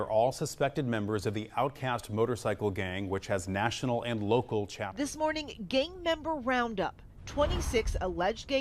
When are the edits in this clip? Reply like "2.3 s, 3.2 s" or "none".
4.9 s